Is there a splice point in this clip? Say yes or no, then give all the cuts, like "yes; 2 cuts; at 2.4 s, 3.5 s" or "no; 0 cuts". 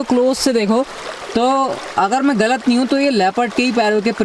no; 0 cuts